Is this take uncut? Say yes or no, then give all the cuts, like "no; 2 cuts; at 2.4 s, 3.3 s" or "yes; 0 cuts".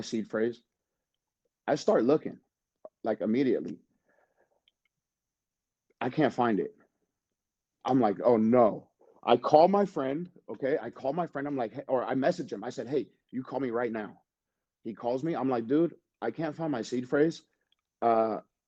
yes; 0 cuts